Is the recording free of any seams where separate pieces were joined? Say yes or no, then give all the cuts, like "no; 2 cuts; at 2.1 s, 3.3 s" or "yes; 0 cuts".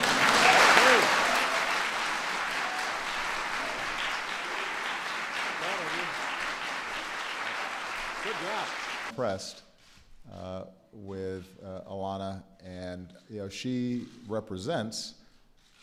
yes; 0 cuts